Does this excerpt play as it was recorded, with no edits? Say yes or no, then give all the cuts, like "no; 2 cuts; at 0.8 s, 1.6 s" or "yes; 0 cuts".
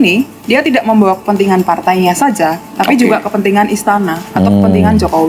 yes; 0 cuts